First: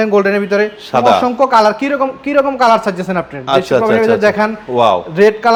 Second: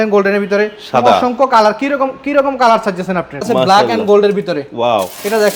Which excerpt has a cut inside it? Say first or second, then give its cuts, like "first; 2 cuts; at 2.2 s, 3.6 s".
second; 1 cut; at 3.5 s